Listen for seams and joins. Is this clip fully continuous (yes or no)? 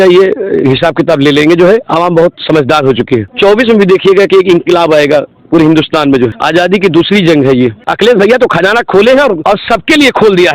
no